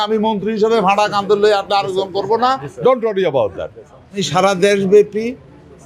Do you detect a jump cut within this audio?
yes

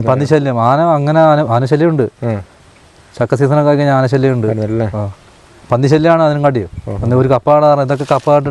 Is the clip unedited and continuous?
yes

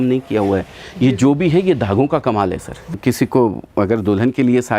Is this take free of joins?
no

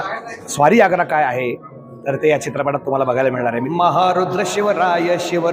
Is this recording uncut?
no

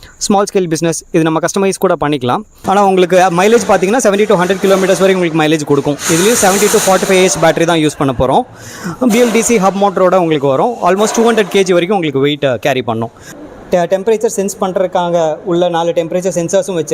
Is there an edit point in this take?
yes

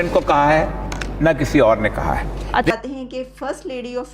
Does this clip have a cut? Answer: yes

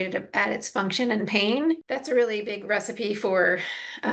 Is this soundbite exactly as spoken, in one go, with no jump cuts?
no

